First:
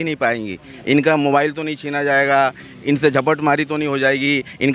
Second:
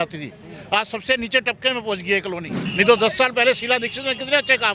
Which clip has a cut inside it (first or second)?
second